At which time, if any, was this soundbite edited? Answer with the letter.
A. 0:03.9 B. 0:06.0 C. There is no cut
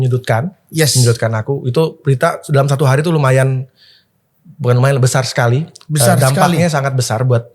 C